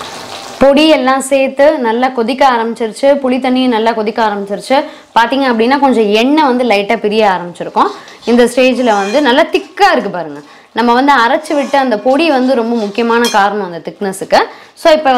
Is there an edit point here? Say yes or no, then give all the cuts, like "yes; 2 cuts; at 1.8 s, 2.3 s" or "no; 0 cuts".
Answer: no; 0 cuts